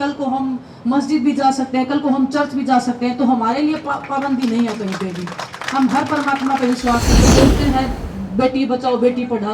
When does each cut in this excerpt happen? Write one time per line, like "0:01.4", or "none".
0:07.2